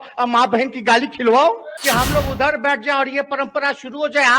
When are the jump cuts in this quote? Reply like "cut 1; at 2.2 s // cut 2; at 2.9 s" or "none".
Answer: cut 1; at 1.7 s